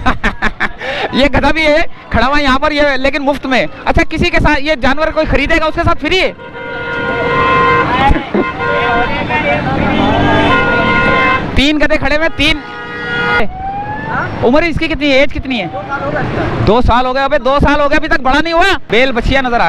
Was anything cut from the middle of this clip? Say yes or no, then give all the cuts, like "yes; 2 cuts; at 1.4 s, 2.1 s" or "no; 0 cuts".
yes; 2 cuts; at 13.4 s, 18.9 s